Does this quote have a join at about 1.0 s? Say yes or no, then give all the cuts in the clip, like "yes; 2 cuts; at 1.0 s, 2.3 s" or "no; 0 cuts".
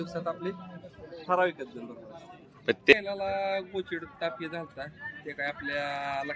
no; 1 cut; at 2.9 s